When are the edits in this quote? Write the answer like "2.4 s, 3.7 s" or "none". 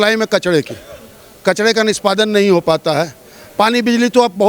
none